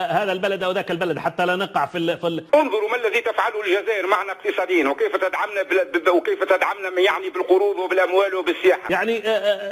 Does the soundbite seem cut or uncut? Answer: cut